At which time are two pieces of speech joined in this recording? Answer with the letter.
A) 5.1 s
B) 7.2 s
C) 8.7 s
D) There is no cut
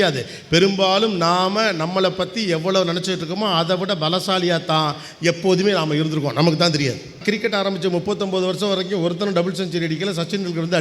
B